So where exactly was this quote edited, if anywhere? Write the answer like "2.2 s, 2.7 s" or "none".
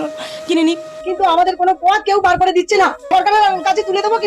0.9 s, 3.0 s